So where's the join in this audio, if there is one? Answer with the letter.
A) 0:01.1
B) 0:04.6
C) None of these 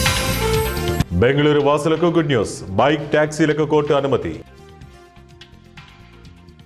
C